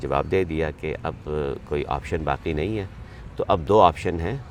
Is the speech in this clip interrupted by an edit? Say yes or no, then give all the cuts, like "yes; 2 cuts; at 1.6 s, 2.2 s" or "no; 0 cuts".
no; 0 cuts